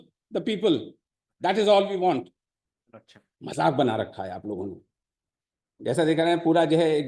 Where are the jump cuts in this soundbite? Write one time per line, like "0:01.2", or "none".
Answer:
none